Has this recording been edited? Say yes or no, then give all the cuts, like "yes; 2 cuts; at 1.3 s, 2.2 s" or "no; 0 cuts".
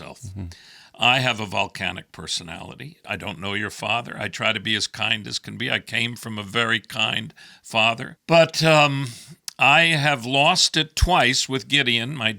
yes; 1 cut; at 8.1 s